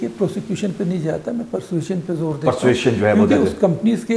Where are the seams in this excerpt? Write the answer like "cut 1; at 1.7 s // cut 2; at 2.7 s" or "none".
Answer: none